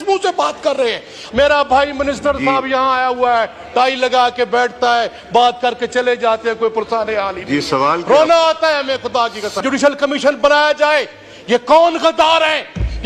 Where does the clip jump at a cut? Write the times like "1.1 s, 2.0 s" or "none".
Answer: 1.2 s, 9.6 s